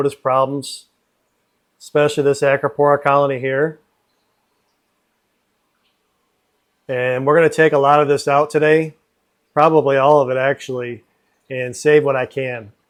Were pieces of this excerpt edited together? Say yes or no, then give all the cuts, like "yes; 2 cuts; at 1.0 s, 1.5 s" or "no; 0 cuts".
no; 0 cuts